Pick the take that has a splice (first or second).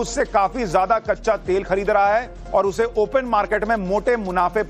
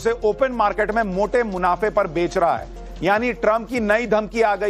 first